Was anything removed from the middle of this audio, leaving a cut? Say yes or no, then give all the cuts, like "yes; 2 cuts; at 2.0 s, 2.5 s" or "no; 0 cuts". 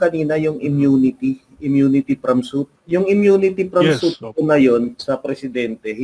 yes; 1 cut; at 2.8 s